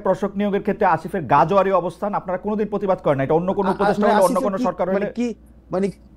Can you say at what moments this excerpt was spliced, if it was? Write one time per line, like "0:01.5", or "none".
none